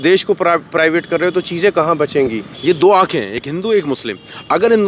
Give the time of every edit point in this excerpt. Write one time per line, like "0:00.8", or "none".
0:02.5

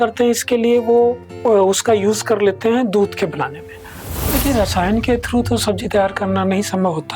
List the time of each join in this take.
0:04.0

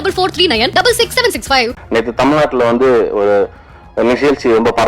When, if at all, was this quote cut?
0:01.8

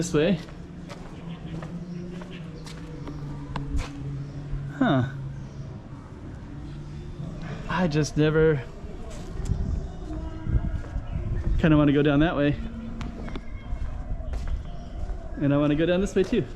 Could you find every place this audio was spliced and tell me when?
none

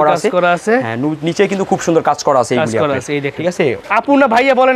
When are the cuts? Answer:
0:03.8

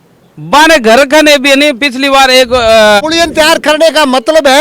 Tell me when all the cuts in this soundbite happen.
0:03.0

